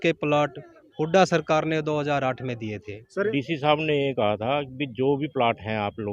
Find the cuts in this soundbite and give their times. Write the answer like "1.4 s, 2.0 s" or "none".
3.3 s